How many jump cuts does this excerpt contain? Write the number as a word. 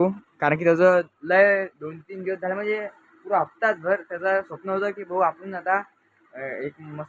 zero